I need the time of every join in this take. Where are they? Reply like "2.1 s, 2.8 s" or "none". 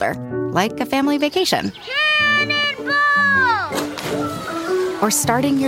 none